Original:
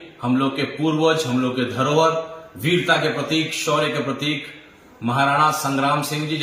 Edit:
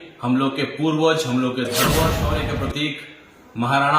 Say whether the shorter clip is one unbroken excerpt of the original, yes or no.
no